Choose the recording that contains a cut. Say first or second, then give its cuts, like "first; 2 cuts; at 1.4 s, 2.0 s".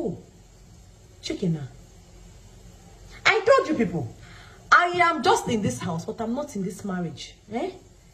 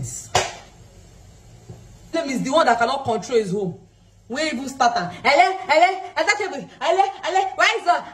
second; 1 cut; at 2.1 s